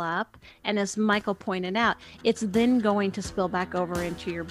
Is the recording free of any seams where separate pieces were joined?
yes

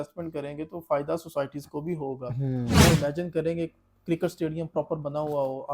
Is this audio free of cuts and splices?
no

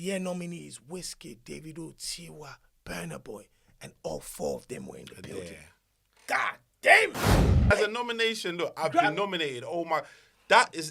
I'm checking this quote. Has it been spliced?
yes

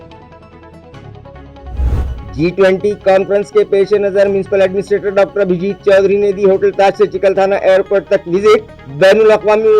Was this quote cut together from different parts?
no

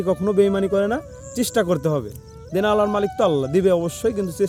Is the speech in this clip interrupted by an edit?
no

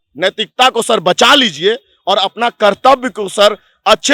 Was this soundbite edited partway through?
no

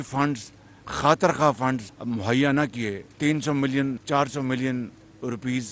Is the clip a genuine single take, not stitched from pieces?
no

